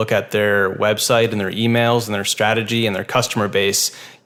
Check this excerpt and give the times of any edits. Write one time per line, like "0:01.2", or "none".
none